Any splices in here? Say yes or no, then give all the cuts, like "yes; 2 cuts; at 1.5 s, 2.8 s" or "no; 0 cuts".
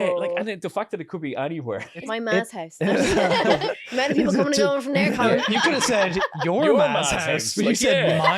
yes; 3 cuts; at 2.1 s, 3.6 s, 5.5 s